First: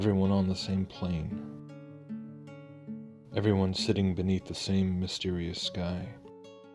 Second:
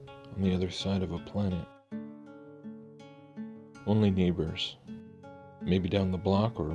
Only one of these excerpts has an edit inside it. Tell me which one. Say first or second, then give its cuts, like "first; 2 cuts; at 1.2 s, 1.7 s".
second; 1 cut; at 4.6 s